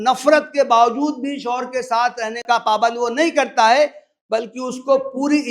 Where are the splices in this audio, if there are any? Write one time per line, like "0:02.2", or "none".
0:02.4